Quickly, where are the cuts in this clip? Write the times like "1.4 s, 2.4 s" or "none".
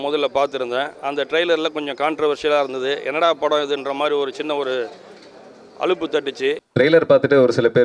6.6 s